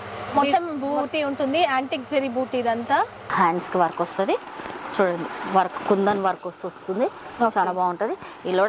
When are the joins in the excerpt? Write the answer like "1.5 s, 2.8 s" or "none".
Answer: 3.3 s

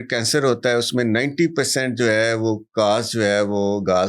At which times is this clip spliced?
none

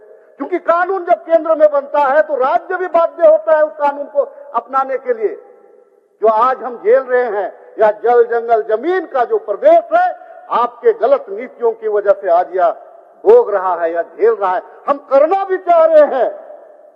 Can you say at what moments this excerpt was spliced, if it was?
none

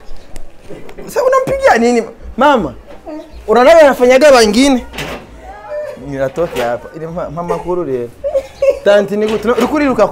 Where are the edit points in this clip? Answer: 4.9 s

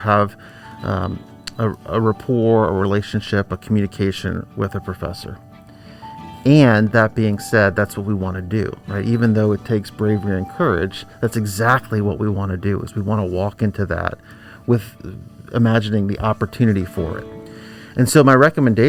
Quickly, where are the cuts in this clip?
none

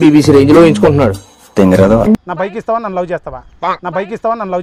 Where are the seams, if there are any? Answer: 2.3 s

